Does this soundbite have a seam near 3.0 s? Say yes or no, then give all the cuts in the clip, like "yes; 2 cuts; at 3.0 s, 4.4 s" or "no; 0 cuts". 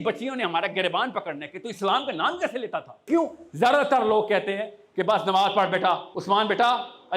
yes; 2 cuts; at 3.0 s, 6.1 s